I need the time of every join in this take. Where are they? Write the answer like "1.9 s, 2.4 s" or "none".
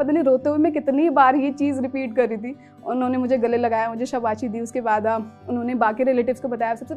none